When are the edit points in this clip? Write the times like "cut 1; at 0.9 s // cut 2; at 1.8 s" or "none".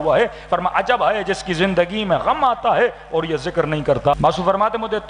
cut 1; at 4.1 s